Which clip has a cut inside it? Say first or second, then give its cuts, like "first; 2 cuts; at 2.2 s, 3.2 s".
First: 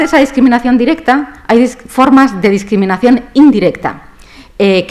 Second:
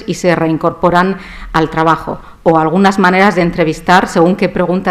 second; 1 cut; at 3.9 s